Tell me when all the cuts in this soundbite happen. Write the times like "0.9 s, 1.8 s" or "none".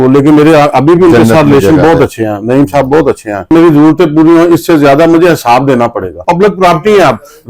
3.5 s, 6.2 s